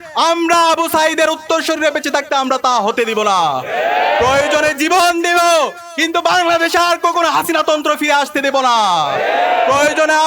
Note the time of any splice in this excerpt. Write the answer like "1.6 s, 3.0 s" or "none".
none